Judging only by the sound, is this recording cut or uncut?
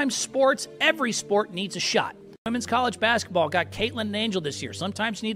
cut